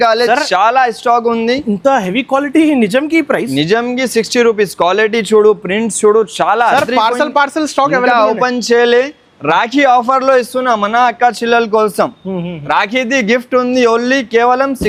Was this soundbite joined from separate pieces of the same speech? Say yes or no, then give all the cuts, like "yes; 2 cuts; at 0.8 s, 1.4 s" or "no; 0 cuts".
no; 0 cuts